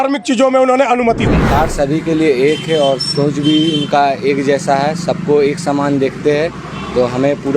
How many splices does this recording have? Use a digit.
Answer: 1